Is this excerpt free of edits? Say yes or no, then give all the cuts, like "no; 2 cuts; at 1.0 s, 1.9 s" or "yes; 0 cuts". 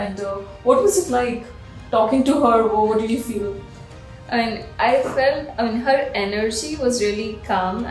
yes; 0 cuts